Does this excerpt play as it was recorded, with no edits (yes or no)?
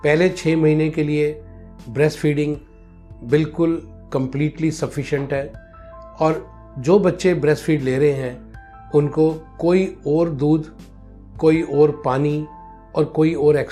yes